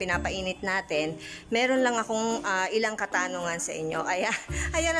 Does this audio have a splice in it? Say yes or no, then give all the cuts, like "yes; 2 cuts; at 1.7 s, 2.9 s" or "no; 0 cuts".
no; 0 cuts